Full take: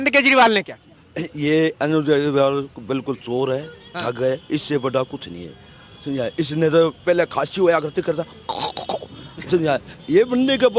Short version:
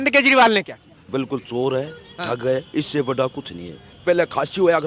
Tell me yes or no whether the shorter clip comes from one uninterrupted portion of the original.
no